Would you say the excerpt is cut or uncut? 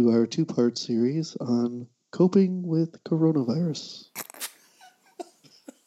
cut